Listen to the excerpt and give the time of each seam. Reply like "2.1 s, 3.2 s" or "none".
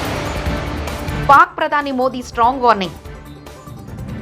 1.2 s